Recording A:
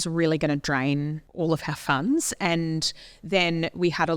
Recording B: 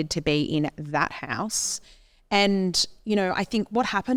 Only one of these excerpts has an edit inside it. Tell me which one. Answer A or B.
A